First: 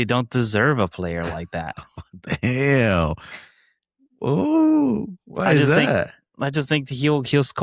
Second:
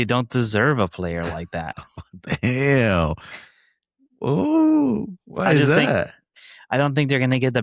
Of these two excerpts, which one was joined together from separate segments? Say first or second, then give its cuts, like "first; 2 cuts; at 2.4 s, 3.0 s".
second; 1 cut; at 6.4 s